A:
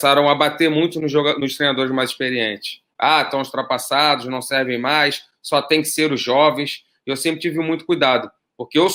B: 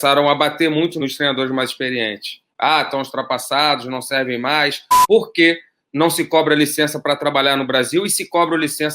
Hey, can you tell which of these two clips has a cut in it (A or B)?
B